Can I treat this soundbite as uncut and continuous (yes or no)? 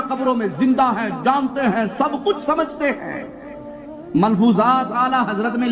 yes